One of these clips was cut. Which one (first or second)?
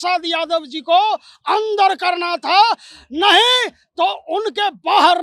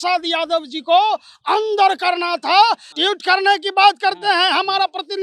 second